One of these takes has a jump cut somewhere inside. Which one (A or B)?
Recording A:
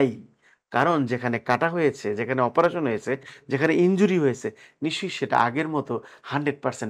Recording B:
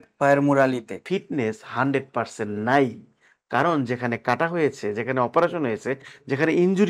B